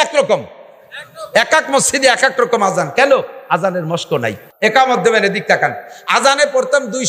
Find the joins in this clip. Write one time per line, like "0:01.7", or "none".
0:04.4